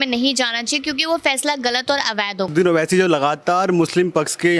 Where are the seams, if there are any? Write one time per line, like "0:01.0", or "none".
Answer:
0:02.5

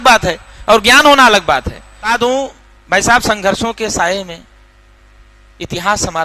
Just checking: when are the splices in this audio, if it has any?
none

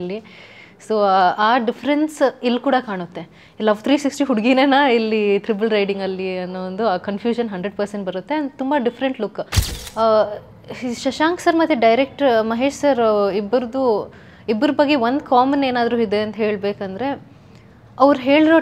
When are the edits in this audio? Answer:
0:09.6

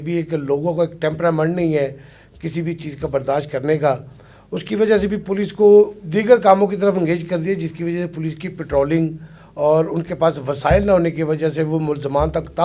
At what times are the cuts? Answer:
none

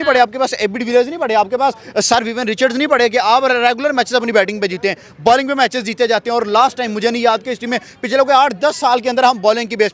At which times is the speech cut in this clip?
none

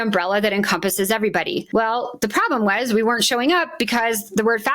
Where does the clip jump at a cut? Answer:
0:01.6

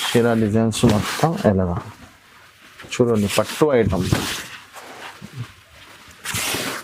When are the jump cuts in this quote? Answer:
none

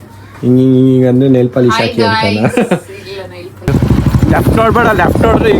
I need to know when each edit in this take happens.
0:03.7

